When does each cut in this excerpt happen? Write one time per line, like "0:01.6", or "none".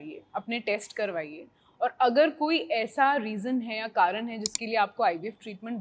none